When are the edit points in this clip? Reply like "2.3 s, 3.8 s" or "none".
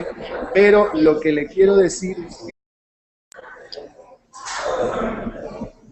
none